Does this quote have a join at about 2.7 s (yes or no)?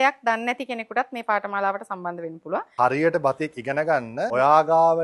yes